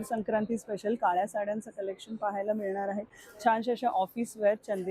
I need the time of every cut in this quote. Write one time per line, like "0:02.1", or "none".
none

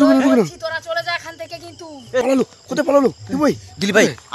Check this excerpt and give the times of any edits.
0:02.1

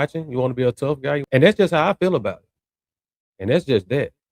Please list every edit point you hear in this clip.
0:01.2

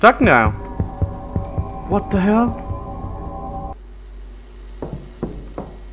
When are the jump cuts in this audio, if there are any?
0:03.7

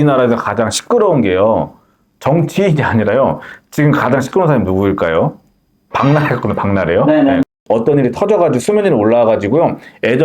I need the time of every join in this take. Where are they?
0:07.6

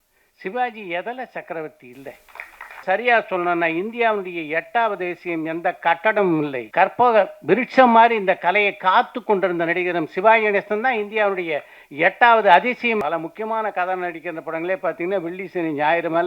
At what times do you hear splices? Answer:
0:02.8
0:06.6
0:13.0

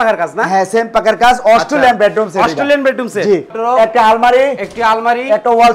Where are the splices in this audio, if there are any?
0:03.5

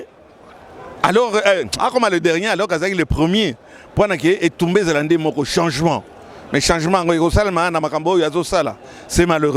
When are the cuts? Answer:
none

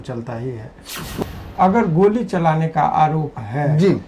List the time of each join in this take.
0:01.2

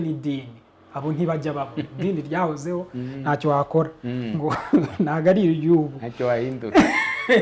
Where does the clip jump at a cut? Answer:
none

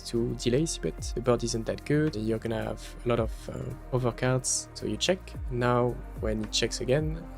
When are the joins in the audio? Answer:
0:01.1
0:02.2
0:03.7
0:04.6

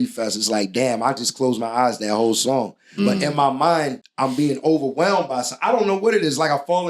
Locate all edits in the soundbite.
0:04.0

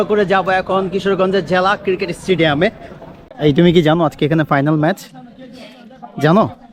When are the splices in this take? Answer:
0:03.1

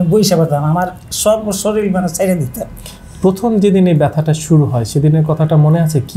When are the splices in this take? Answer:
none

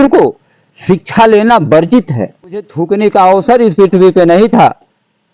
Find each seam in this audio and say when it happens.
0:02.8

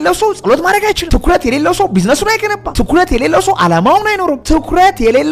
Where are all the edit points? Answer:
0:04.4

